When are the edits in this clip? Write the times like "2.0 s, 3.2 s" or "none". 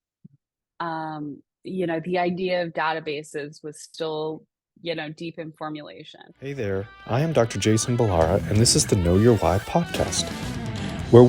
6.5 s

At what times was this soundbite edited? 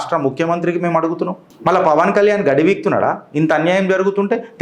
1.4 s

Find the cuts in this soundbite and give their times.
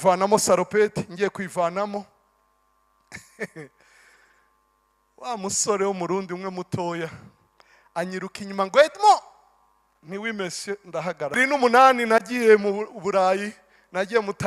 11.4 s

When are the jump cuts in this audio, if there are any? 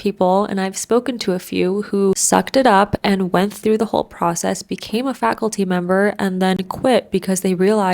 2.2 s

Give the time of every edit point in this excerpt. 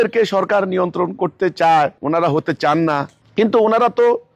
2.0 s, 3.2 s

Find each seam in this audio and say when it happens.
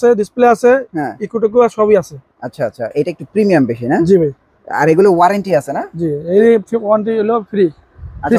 none

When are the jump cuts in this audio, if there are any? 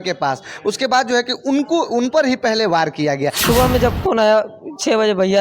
3.4 s

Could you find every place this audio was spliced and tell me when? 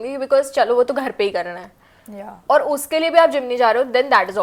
none

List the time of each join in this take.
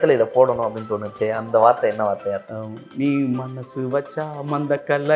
2.5 s

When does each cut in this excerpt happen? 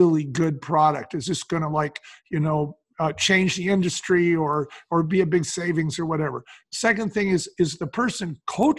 none

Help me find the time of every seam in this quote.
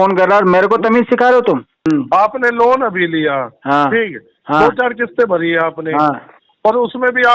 1.9 s

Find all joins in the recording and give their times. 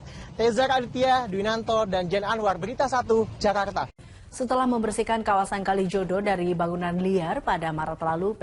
none

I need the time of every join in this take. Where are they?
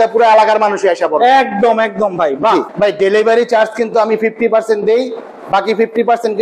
2.7 s

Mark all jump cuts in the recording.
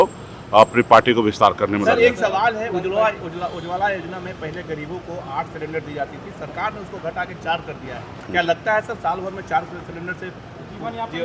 none

